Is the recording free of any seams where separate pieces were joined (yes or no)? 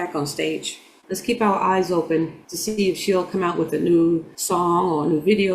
no